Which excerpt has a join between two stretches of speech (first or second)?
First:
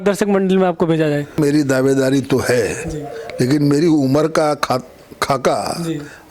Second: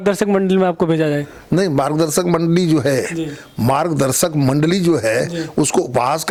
first